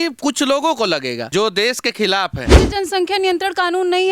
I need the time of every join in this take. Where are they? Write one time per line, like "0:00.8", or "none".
0:01.2
0:02.5